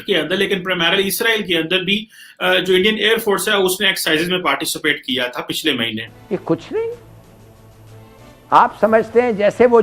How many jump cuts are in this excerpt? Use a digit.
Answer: 1